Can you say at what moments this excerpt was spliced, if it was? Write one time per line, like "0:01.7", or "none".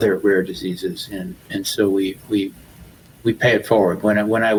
none